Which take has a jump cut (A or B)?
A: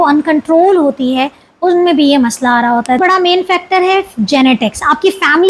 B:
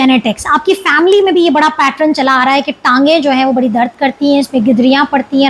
A